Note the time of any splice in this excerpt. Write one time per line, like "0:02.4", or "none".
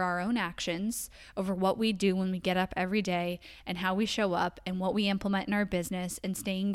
none